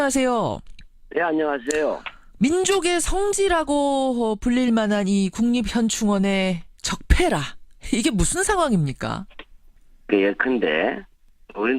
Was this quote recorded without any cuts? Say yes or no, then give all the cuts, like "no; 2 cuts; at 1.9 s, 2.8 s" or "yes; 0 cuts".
no; 1 cut; at 6.7 s